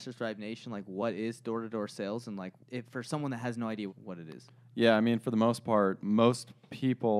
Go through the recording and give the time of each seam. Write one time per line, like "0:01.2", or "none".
0:02.6
0:03.9
0:06.0